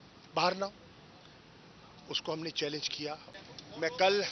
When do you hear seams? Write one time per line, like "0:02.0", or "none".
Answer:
0:03.3